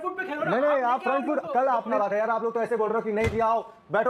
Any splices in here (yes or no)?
yes